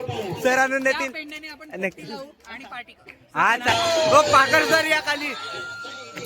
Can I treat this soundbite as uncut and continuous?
no; 1 cut; at 3.7 s

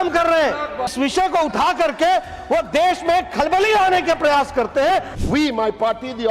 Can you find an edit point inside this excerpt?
yes; 2 cuts; at 0.9 s, 5.1 s

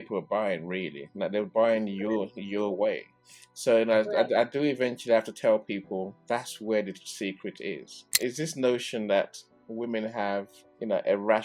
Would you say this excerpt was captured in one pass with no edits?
no; 1 cut; at 8.2 s

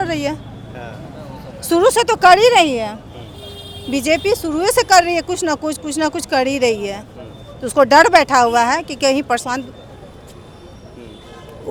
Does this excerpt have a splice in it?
no; 0 cuts

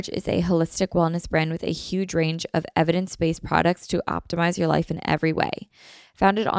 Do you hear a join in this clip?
no; 0 cuts

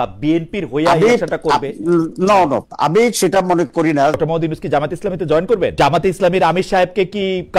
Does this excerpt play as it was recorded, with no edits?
no; 2 cuts; at 4.2 s, 5.7 s

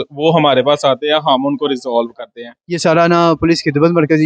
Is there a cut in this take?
yes; 1 cut; at 2.6 s

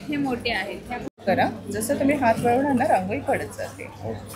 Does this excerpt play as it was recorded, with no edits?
no; 1 cut; at 1.2 s

